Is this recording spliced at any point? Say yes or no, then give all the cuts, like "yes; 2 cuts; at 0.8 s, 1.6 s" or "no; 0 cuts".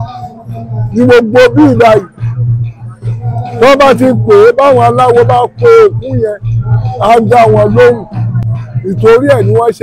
no; 0 cuts